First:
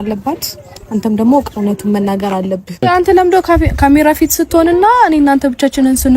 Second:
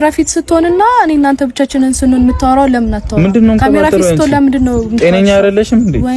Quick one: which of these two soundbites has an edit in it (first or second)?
first